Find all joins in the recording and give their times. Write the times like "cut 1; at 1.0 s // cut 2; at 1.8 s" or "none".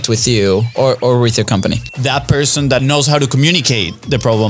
cut 1; at 1.9 s // cut 2; at 2.8 s